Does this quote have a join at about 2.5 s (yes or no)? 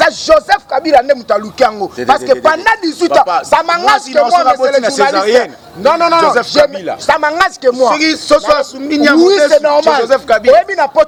no